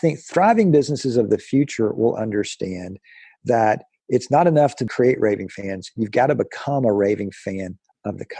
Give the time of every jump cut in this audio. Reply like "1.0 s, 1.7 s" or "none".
4.8 s